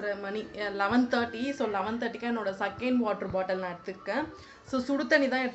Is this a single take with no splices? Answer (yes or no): yes